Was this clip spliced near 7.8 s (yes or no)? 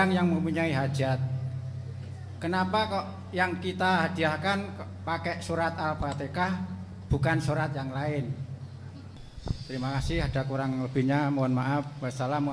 no